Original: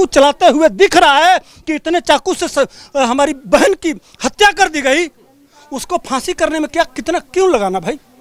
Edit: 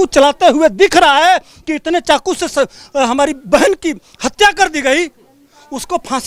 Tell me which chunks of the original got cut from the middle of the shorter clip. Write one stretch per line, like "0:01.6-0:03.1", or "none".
none